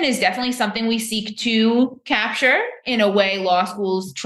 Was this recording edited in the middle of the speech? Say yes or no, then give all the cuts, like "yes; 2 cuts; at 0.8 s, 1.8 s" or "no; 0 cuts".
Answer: no; 0 cuts